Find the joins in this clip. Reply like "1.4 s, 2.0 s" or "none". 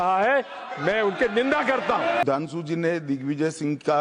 2.2 s